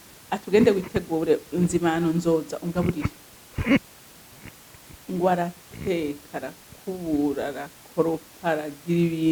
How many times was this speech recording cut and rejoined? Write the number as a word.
zero